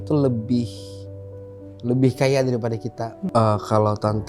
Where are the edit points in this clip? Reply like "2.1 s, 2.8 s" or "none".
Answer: 3.2 s